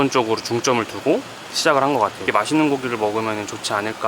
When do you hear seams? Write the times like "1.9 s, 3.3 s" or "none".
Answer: 2.2 s